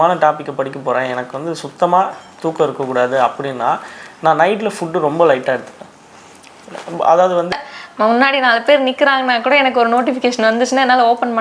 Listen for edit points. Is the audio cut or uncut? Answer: cut